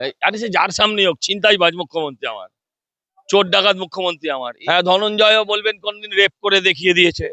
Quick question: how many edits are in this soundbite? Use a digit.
1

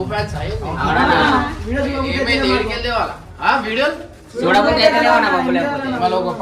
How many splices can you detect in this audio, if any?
1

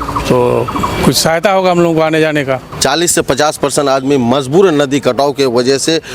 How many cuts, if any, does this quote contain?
1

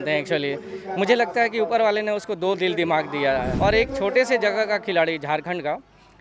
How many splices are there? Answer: 1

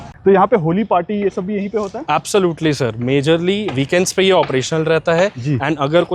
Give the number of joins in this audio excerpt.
0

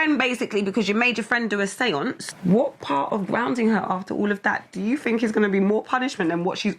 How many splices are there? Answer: 1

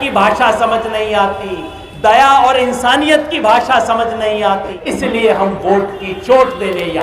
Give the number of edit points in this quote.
1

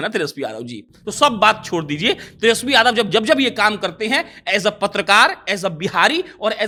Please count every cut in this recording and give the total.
0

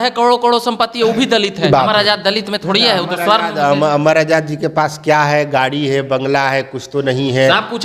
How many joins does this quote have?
1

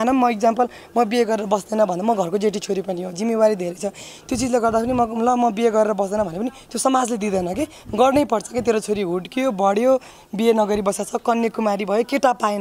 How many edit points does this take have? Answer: 0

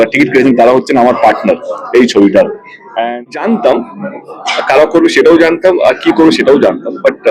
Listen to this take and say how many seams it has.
1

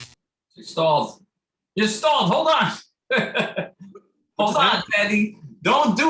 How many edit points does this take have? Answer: 0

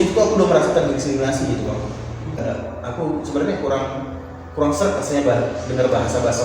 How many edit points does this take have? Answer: 1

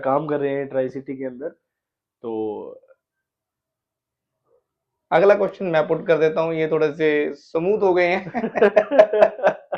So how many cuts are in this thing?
0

